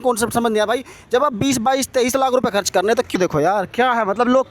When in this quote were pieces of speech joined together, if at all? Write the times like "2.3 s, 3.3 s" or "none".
3.2 s